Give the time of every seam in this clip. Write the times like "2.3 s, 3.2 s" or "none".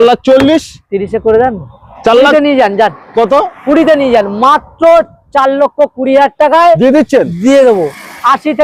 none